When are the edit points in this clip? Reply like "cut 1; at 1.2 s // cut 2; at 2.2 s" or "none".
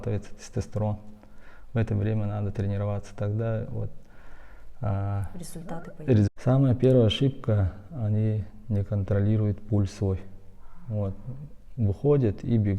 cut 1; at 6.3 s